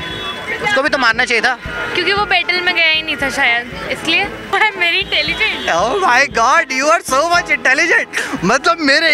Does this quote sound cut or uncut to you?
cut